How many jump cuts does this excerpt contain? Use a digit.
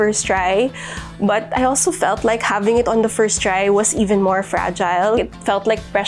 1